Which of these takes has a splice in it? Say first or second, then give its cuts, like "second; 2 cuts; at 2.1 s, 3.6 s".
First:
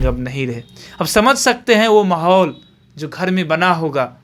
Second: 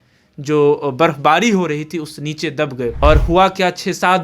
second; 1 cut; at 3.0 s